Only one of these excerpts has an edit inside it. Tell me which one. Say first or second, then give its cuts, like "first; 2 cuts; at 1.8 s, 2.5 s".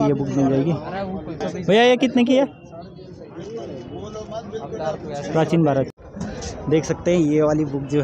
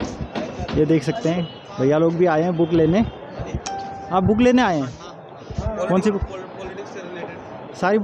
first; 2 cuts; at 1.4 s, 6.0 s